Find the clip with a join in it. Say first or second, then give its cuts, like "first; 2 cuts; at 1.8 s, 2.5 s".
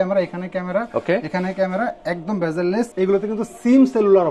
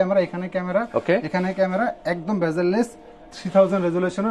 first; 1 cut; at 2.9 s